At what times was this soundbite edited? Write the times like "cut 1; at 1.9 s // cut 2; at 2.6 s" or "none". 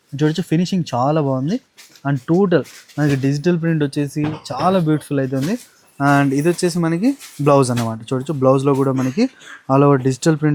none